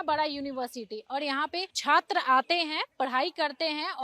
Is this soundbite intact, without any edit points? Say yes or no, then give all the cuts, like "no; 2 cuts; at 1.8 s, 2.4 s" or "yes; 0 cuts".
no; 1 cut; at 1.7 s